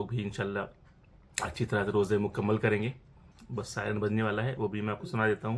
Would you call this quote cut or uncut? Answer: uncut